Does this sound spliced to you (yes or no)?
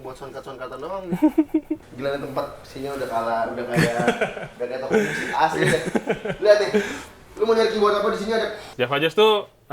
yes